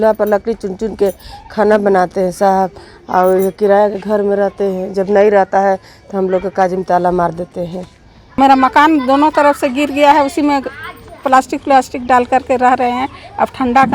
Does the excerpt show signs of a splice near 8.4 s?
yes; 1 cut; at 8.4 s

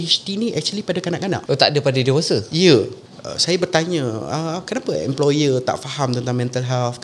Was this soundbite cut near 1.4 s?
yes; 2 cuts; at 1.4 s, 3.0 s

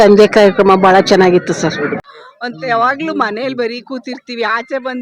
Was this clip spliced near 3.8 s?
no; 1 cut; at 2.0 s

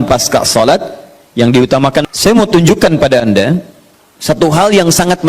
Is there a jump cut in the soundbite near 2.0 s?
yes; 1 cut; at 2.0 s

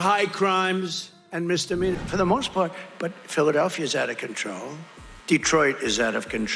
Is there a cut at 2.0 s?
yes; 1 cut; at 2.0 s

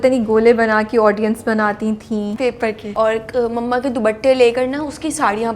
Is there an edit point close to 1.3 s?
no; 1 cut; at 2.6 s

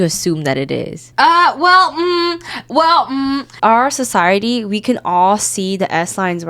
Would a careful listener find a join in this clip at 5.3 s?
no; 2 cuts; at 1.1 s, 3.5 s

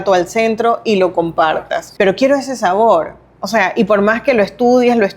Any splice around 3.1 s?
no; 1 cut; at 1.8 s

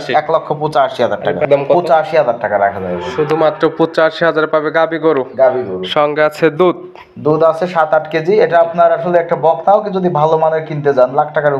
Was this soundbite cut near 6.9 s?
no; 1 cut; at 1.4 s

